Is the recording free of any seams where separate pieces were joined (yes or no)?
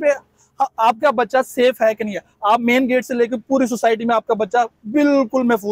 yes